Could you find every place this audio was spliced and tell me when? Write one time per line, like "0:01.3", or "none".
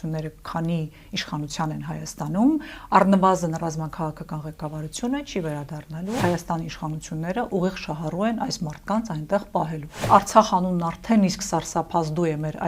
0:06.2
0:10.1